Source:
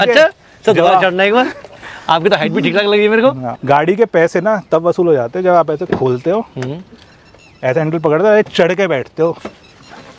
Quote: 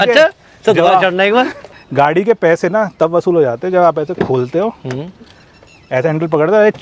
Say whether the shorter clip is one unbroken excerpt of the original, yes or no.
no